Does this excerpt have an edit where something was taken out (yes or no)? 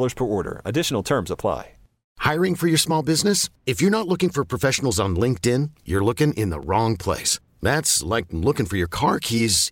yes